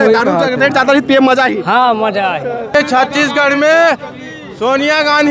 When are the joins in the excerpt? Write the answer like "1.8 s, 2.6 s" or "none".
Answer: 2.7 s